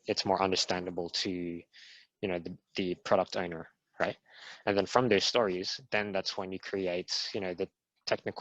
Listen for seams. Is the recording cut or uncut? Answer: uncut